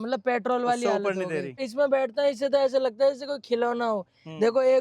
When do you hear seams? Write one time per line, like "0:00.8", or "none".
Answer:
0:01.6